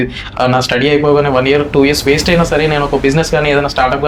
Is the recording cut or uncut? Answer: uncut